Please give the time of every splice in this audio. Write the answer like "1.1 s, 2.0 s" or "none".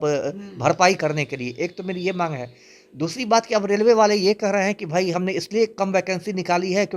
none

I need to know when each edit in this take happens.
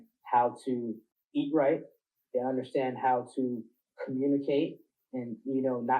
1.1 s

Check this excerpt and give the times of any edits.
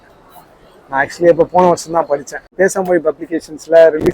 2.5 s

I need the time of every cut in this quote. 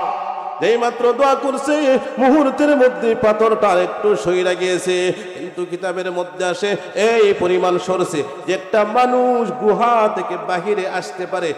none

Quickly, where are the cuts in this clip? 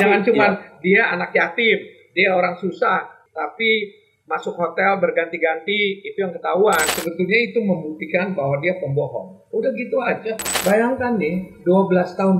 3.2 s, 6.9 s, 10.5 s

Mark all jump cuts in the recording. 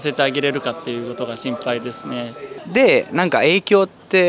2.5 s

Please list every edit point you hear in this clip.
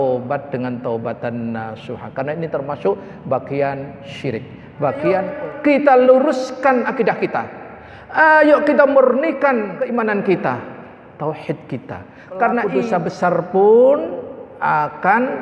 5.3 s, 9.8 s, 12.7 s

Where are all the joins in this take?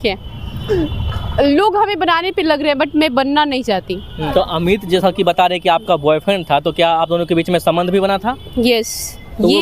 4.3 s

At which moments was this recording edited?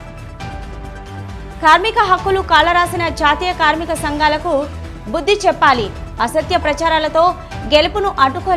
none

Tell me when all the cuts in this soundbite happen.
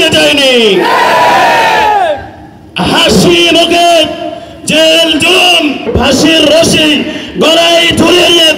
5.9 s

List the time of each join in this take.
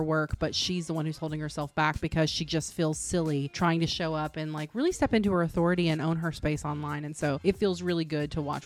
none

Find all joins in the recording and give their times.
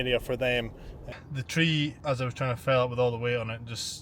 1.0 s

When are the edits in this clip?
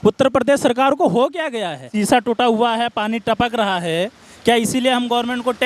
1.8 s

